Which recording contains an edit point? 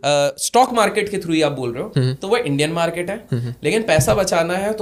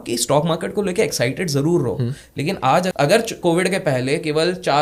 second; 1 cut; at 2.9 s

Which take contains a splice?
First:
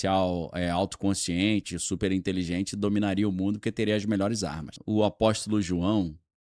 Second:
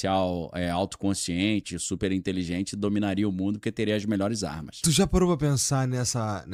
first; 1 cut; at 4.7 s

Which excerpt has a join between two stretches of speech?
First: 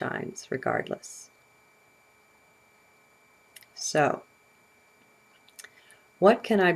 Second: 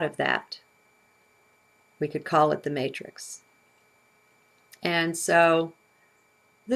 second; 1 cut; at 5.5 s

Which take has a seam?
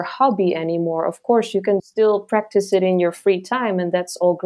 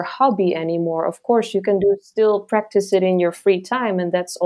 first; 1 cut; at 1.8 s

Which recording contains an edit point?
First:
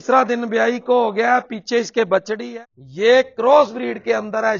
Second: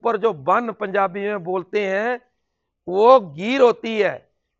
first; 1 cut; at 2.4 s

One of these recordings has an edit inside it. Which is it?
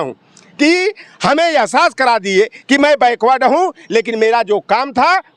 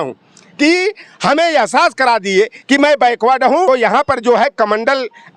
second; 1 cut; at 3.7 s

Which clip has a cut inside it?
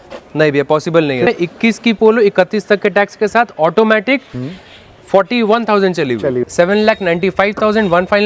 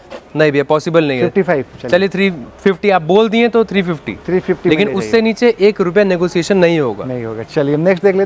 first; 2 cuts; at 1.2 s, 6.4 s

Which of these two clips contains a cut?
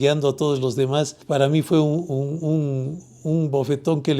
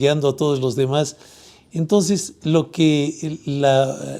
first; 1 cut; at 1.2 s

